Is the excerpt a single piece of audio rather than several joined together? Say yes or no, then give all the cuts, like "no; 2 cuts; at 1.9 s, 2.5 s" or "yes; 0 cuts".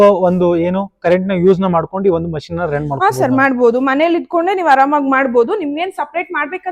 yes; 0 cuts